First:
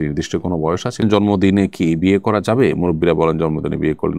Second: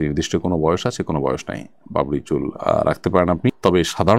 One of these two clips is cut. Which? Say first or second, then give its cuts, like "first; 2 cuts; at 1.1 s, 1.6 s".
first; 1 cut; at 1.0 s